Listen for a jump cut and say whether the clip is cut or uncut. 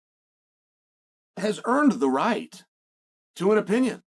uncut